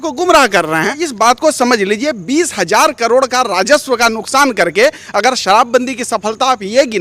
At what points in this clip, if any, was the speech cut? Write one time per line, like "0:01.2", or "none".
0:01.1